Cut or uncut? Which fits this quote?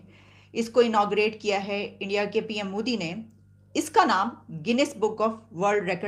uncut